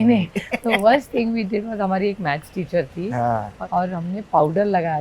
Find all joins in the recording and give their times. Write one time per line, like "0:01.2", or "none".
0:03.5